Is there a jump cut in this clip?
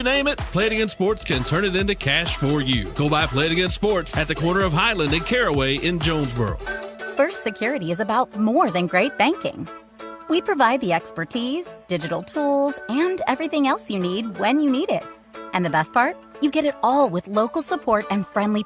yes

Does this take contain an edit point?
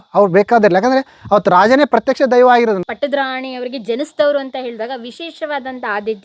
yes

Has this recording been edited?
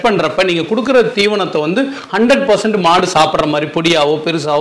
no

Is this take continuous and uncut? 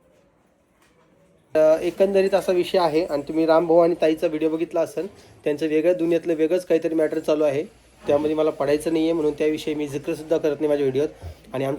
no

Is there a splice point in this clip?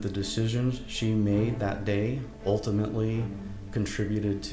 no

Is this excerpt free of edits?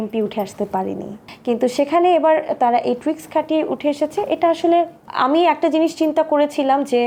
yes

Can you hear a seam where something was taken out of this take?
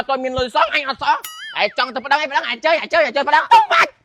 no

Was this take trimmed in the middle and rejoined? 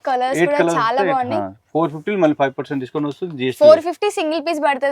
no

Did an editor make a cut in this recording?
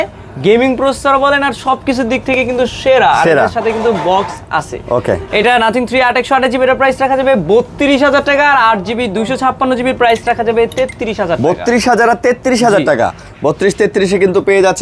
no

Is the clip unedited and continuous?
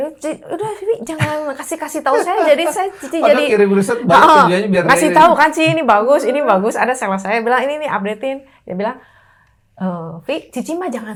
yes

